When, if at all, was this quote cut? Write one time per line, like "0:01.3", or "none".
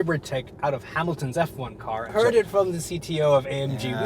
0:02.1